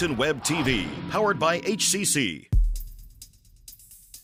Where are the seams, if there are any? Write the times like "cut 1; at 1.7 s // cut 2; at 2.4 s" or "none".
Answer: none